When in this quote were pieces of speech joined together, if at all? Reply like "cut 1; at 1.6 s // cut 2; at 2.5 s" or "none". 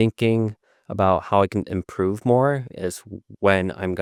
none